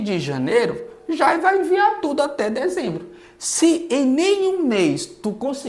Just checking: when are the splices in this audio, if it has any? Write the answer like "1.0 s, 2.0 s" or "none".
none